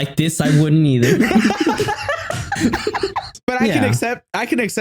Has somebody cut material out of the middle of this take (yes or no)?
yes